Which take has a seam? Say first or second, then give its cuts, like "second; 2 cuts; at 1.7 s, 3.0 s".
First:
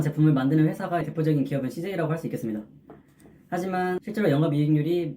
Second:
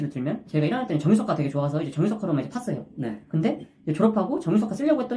first; 2 cuts; at 1.0 s, 4.0 s